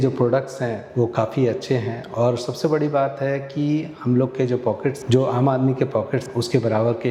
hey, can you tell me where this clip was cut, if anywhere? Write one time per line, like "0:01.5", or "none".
none

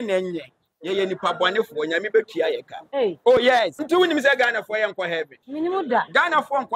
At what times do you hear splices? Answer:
0:03.8
0:05.4

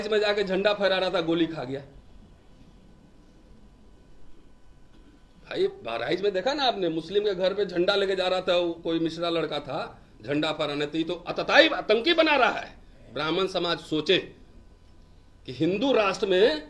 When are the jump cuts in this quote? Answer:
none

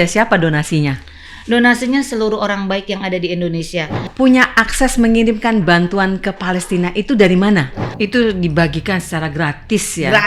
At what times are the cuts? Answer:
0:04.0
0:07.8

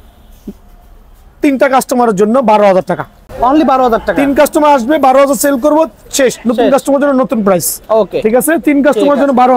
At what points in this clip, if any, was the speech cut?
none

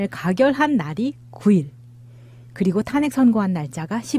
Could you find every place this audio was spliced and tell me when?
0:01.3

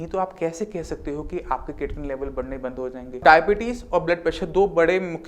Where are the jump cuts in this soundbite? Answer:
0:03.2

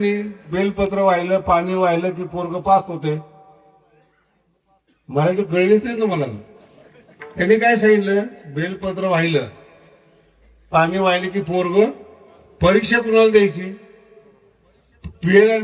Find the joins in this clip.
none

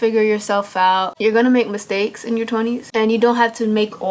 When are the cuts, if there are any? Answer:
0:01.1

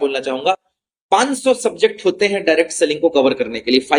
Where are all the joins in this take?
none

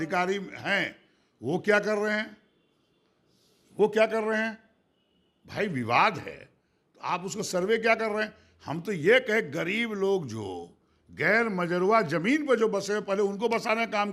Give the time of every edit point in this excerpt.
none

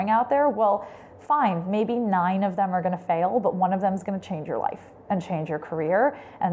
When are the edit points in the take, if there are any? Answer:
none

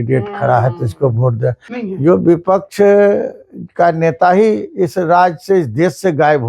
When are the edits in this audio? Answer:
0:01.7

